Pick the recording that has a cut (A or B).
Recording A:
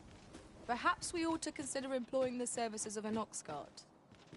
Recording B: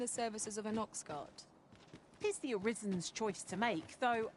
A